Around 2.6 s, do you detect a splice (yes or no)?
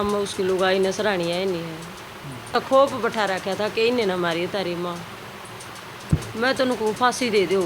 yes